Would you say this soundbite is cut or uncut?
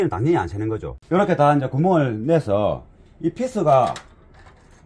cut